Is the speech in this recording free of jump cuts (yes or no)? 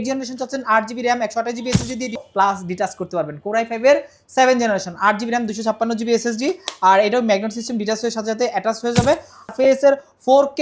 no